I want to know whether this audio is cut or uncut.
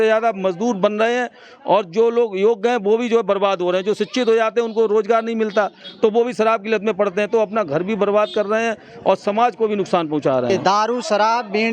cut